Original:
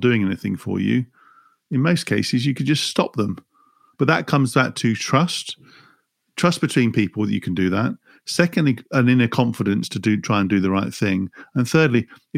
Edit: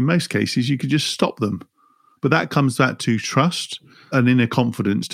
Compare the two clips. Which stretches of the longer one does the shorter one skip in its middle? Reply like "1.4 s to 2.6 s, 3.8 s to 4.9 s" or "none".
5.8 s to 8.8 s